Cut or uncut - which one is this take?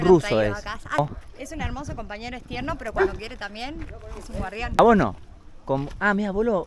cut